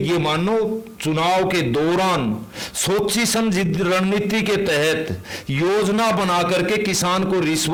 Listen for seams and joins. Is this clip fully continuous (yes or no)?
yes